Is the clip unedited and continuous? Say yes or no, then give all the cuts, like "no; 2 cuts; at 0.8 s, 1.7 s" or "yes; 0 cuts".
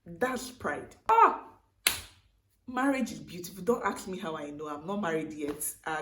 no; 1 cut; at 1.1 s